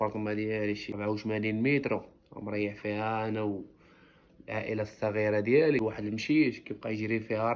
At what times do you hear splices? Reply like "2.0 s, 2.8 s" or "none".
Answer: 0.9 s, 5.8 s